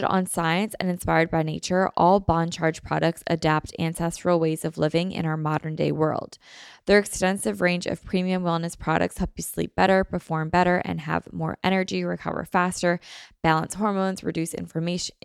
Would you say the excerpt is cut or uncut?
uncut